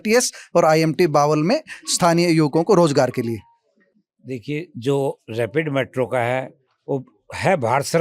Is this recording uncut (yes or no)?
yes